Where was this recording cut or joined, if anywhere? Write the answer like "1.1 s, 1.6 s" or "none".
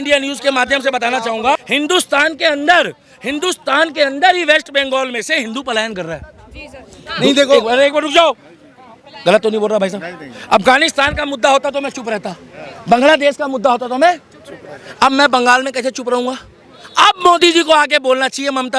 1.5 s